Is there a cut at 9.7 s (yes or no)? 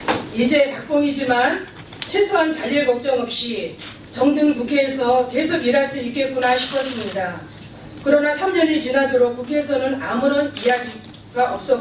no